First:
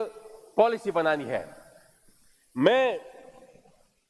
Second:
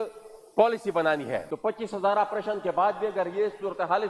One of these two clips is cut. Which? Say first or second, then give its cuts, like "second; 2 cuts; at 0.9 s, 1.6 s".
second; 1 cut; at 1.5 s